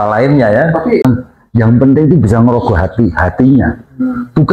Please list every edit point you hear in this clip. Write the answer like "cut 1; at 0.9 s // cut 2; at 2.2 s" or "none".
cut 1; at 1.0 s